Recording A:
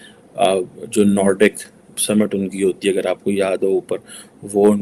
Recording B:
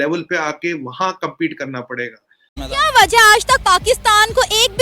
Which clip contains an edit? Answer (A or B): B